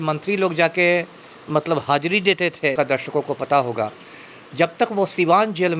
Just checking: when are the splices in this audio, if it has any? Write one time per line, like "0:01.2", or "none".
0:02.7